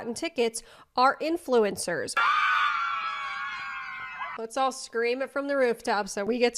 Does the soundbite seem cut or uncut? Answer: cut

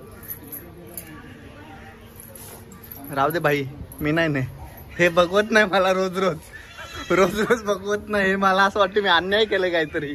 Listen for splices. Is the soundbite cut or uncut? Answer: uncut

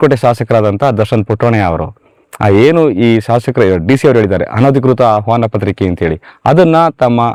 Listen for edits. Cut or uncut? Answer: uncut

